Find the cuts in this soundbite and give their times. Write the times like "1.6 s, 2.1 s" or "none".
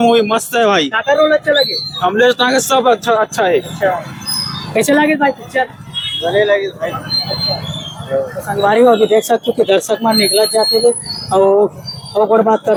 none